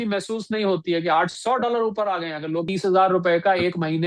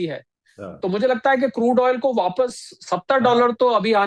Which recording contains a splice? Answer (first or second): first